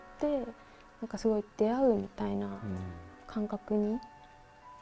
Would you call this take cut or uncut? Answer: uncut